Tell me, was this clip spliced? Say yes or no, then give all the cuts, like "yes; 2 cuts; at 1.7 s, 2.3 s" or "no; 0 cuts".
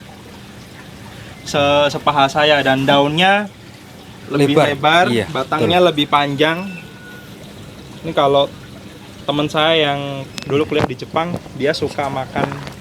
no; 0 cuts